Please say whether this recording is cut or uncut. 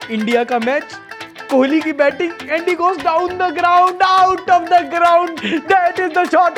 uncut